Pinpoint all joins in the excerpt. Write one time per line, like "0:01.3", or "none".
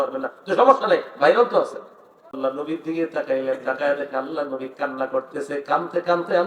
0:02.4